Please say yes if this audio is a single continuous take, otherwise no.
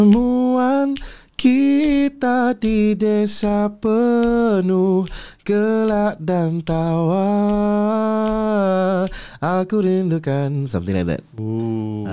yes